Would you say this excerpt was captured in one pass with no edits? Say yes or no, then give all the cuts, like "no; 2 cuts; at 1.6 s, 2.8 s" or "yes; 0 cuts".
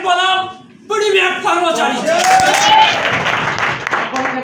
yes; 0 cuts